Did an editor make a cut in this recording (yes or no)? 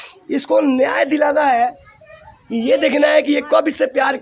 no